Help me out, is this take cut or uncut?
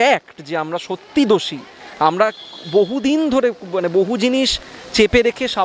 uncut